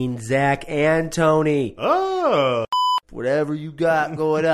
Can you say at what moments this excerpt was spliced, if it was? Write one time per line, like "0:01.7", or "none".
0:02.7

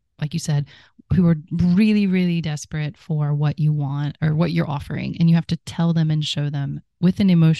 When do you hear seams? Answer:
0:01.2

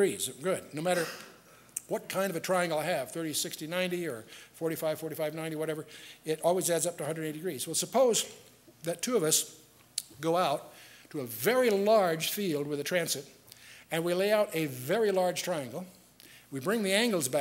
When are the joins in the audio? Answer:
0:03.5

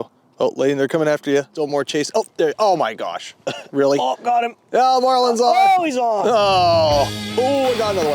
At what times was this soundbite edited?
0:01.5
0:07.2

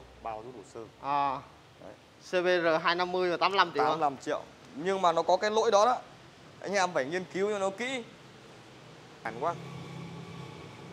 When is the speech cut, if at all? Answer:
0:09.3

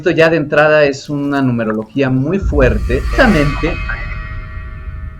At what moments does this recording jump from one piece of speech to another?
0:03.1

